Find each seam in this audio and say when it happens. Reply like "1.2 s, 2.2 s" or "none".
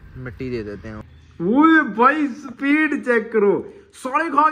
1.0 s